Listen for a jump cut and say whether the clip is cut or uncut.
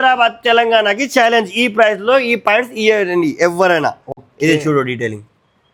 uncut